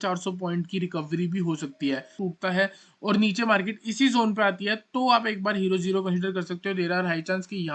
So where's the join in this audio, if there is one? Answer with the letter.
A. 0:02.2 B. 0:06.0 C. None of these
A